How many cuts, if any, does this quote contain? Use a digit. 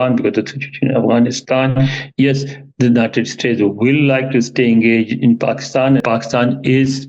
1